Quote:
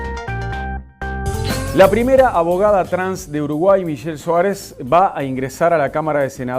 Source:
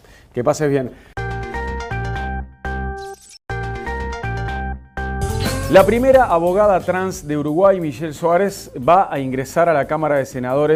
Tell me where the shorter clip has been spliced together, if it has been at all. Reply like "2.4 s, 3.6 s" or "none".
1.2 s